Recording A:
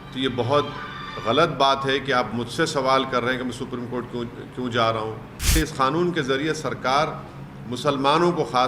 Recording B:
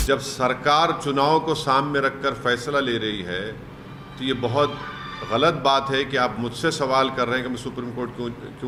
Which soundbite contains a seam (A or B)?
A